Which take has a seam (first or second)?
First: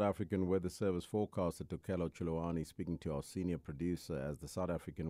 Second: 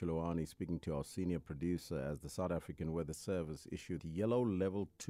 second